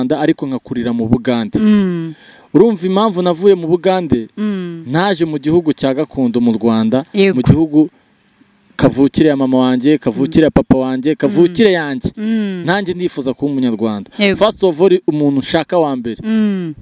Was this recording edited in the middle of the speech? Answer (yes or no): no